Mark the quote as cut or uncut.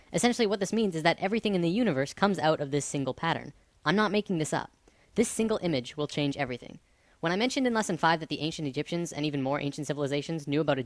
cut